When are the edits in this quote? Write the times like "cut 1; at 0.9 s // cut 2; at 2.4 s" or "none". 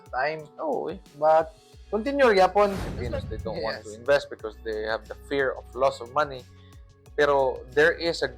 cut 1; at 2.9 s